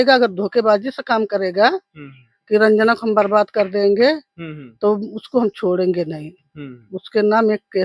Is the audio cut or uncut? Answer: uncut